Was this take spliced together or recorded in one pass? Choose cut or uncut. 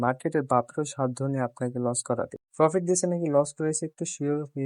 uncut